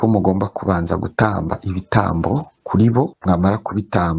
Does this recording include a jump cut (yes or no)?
yes